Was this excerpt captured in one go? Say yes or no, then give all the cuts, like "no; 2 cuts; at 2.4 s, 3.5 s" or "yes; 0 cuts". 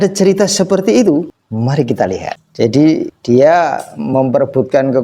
no; 3 cuts; at 1.4 s, 2.4 s, 3.1 s